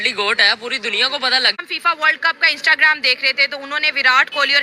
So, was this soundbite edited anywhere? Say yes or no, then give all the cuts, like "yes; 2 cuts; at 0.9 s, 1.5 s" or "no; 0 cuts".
yes; 1 cut; at 1.6 s